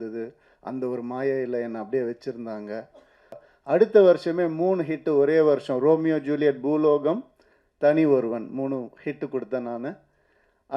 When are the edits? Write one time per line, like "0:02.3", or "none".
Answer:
0:03.5